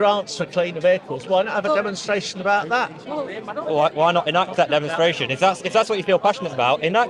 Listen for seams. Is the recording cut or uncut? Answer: uncut